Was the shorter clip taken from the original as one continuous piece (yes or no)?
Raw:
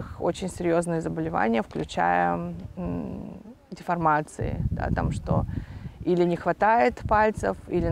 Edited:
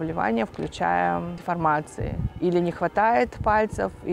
no